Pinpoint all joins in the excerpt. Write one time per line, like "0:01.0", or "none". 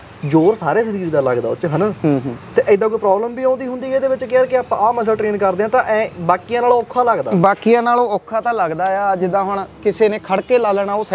none